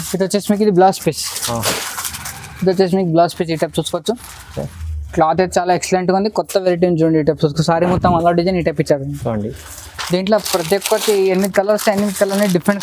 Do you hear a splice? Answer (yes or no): no